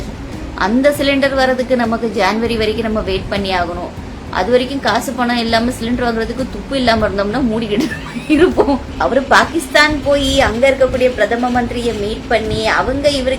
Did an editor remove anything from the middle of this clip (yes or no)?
yes